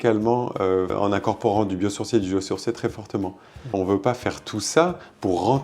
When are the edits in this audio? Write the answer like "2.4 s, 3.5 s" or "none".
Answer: 0.9 s, 3.7 s